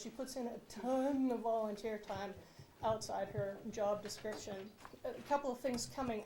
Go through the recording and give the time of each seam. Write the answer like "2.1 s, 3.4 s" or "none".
4.9 s